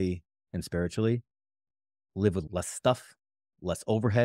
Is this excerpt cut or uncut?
uncut